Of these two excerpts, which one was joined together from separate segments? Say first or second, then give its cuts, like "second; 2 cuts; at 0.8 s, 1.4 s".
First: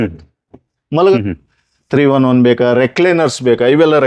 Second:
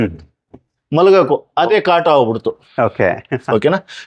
first; 1 cut; at 1.1 s